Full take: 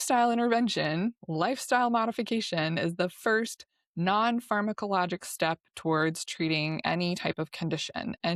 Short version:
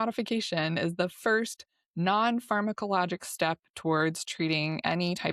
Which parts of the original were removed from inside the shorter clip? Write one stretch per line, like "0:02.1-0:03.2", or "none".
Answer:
none